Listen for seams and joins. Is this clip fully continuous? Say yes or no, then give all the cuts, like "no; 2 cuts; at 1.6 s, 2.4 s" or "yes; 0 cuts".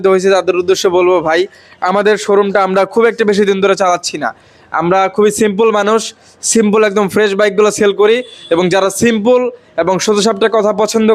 yes; 0 cuts